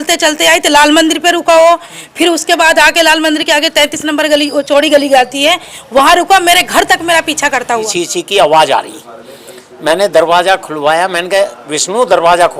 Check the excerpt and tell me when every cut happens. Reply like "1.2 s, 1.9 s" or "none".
7.9 s